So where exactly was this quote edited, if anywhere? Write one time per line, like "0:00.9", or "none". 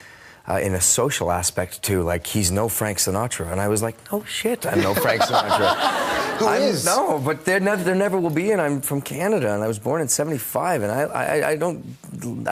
none